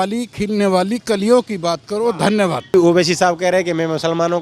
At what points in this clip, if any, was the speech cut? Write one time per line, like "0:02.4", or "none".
0:02.7